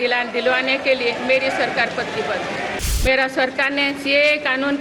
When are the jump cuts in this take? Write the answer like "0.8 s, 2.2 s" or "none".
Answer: 2.8 s